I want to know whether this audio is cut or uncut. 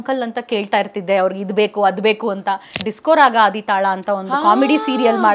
cut